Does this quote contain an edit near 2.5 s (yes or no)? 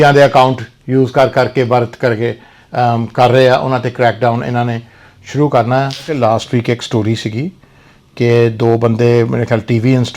no